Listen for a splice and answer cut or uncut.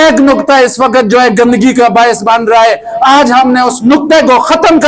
uncut